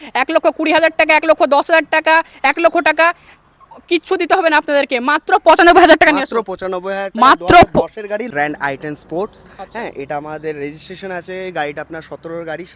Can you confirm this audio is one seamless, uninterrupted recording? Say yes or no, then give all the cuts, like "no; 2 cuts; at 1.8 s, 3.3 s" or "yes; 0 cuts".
no; 1 cut; at 8.3 s